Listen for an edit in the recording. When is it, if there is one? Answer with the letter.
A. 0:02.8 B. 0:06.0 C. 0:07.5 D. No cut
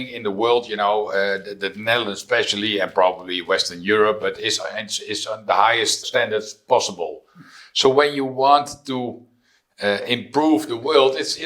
B